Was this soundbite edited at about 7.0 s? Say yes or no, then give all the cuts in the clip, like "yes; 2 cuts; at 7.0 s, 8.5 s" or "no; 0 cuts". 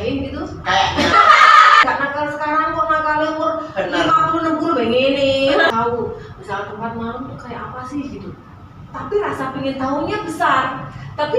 no; 2 cuts; at 1.8 s, 5.7 s